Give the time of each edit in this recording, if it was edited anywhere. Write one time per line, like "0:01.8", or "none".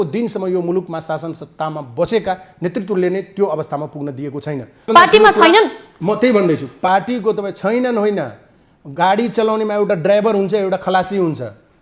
0:04.9